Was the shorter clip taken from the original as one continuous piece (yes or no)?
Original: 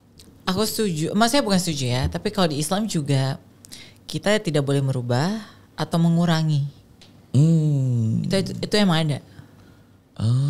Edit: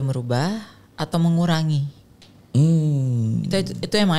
yes